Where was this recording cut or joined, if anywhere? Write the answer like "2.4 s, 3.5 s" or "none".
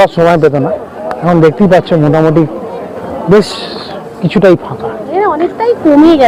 none